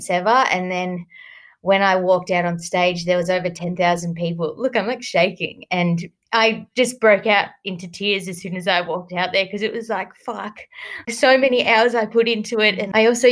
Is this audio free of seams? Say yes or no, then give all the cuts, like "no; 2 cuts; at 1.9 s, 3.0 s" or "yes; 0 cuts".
yes; 0 cuts